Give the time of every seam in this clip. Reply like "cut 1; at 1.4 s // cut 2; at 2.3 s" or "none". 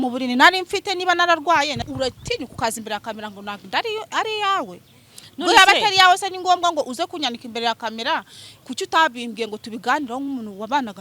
cut 1; at 1.8 s